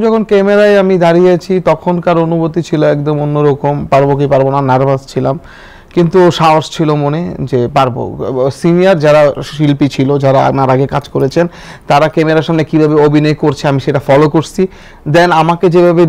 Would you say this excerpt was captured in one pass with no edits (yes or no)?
yes